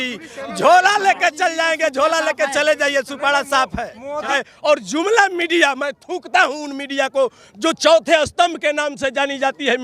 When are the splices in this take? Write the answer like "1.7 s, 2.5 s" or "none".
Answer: 4.4 s